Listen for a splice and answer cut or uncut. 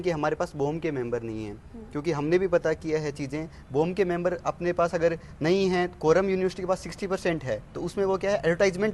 uncut